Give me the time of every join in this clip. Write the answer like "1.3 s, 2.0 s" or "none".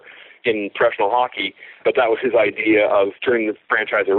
1.8 s, 3.1 s